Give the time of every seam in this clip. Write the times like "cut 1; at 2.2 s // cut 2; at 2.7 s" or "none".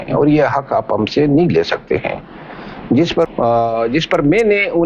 cut 1; at 3.3 s

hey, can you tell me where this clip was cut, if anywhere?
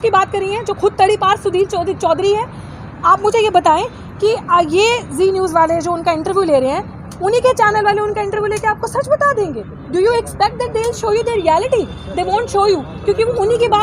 none

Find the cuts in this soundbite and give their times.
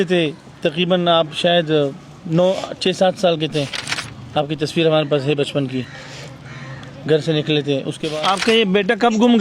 cut 1; at 8.0 s

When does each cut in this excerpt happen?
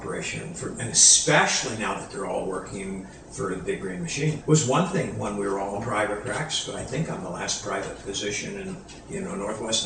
cut 1; at 4.4 s

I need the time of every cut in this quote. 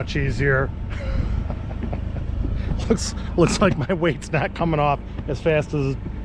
none

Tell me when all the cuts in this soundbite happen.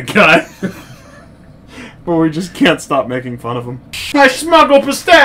cut 1; at 4.1 s

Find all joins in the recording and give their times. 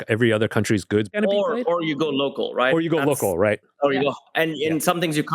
cut 1; at 1.1 s

